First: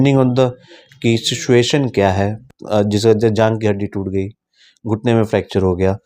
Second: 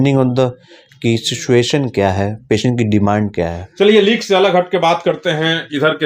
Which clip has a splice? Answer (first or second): first